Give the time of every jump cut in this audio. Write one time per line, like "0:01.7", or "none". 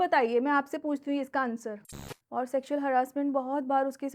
0:01.8